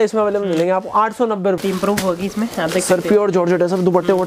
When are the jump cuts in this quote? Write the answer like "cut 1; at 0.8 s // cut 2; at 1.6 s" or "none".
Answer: cut 1; at 1.6 s